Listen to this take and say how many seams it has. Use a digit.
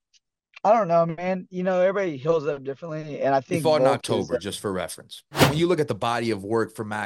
1